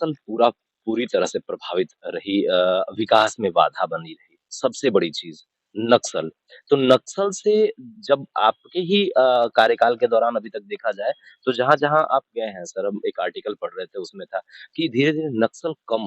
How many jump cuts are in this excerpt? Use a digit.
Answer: 0